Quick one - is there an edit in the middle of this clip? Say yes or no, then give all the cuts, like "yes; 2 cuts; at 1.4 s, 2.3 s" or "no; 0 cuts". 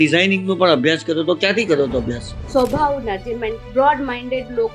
yes; 1 cut; at 2.3 s